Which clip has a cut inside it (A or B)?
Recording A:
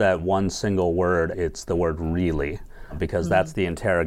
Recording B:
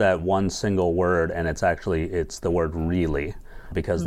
A